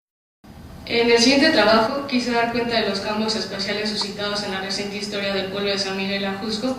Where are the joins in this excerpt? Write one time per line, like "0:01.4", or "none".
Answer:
0:03.8